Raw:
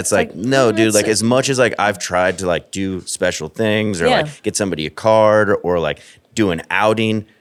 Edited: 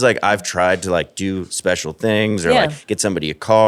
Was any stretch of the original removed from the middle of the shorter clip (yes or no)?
no